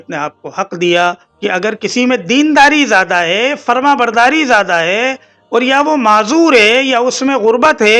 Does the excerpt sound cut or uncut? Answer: uncut